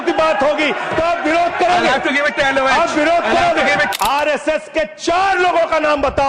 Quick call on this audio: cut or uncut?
cut